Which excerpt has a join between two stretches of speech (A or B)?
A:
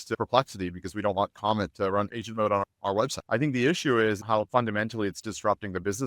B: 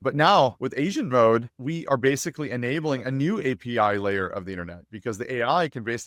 A